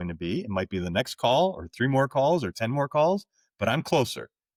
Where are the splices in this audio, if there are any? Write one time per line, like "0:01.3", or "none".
none